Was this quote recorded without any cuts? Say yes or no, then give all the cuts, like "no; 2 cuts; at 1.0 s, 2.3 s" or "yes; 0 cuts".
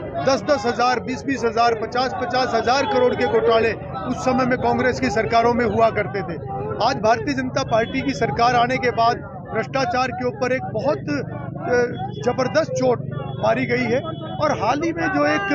yes; 0 cuts